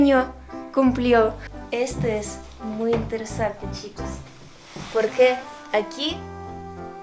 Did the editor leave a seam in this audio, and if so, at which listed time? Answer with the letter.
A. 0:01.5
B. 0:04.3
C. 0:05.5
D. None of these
A